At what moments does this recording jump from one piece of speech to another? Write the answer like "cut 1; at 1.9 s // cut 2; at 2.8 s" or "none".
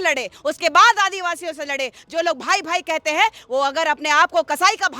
none